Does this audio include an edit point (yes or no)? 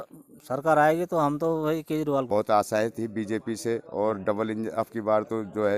yes